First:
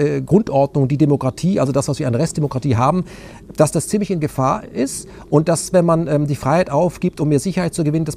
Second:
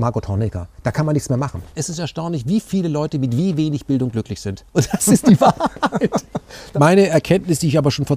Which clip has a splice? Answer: second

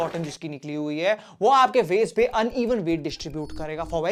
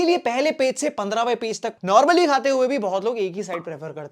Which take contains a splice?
second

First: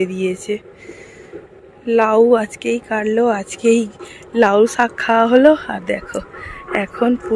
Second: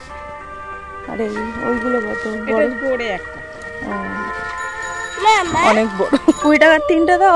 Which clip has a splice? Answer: second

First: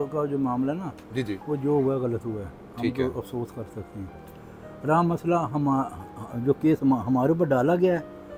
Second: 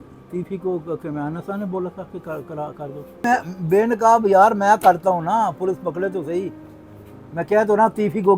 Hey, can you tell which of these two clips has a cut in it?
second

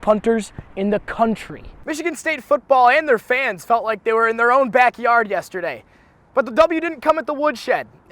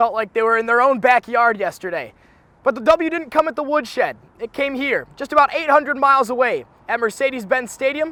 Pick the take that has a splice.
first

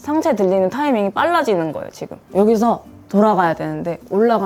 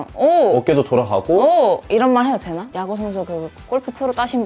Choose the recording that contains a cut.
second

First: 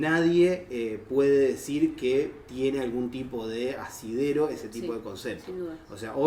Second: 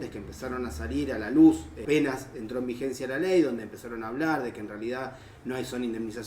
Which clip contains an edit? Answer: second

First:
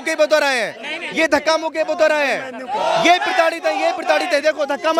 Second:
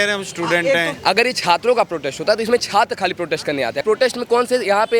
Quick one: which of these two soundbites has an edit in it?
second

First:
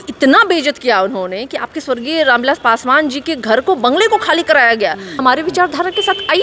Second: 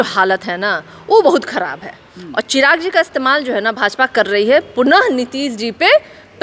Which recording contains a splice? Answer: first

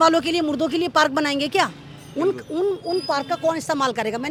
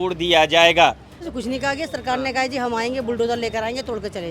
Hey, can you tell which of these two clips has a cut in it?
second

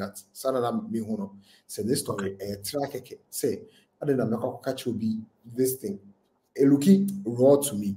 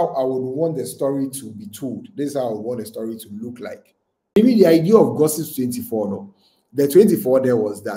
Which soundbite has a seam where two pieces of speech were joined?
second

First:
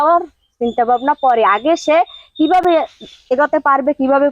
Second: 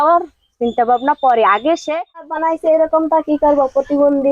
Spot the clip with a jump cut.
second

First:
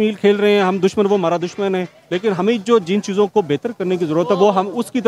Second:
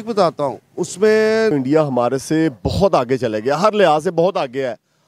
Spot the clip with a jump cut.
second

